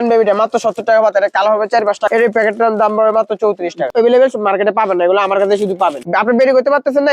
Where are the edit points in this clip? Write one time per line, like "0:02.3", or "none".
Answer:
0:02.0
0:03.9
0:06.1

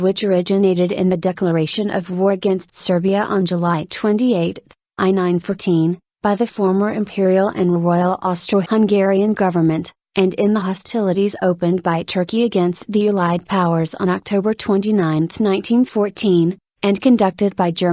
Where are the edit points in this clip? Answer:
0:03.4

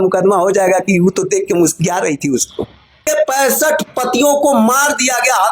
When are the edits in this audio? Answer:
0:03.0

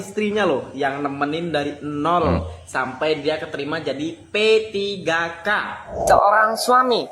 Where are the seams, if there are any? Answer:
0:05.9

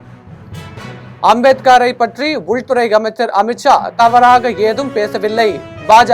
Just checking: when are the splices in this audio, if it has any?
0:01.2

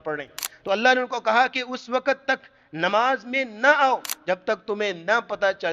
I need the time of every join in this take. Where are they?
0:04.1

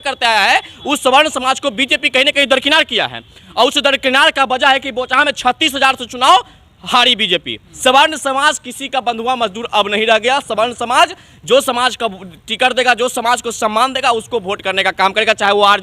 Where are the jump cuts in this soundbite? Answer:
0:07.7

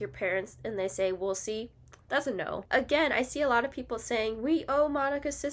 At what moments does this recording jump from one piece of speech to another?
0:02.6

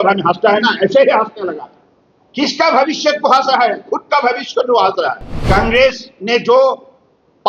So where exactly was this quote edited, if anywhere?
0:05.3

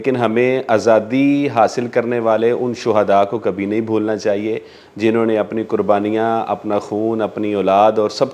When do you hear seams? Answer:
none

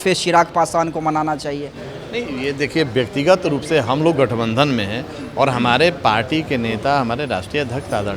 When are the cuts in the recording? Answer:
none

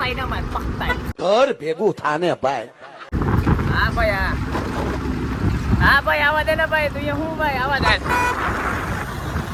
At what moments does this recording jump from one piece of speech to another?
none

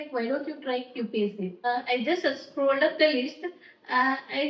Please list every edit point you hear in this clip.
0:01.7

